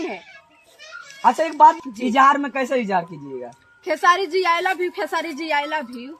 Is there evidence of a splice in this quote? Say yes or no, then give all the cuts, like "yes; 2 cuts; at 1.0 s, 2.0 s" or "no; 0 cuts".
yes; 1 cut; at 1.8 s